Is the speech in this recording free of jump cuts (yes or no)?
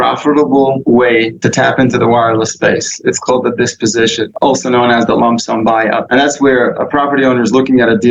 no